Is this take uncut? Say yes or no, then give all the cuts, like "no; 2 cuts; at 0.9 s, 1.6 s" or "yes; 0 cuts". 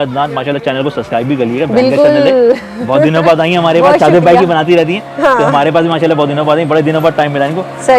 yes; 0 cuts